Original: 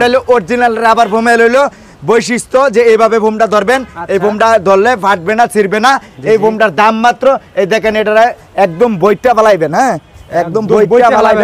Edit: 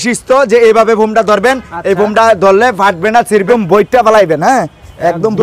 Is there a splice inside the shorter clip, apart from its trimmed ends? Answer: yes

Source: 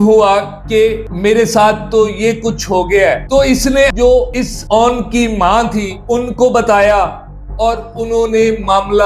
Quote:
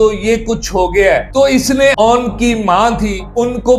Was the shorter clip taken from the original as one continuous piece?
no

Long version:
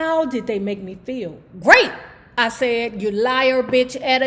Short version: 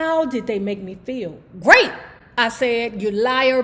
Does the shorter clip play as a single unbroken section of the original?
yes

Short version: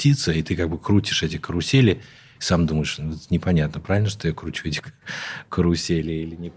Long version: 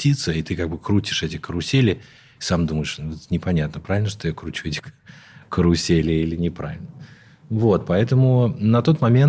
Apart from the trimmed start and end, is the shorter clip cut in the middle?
no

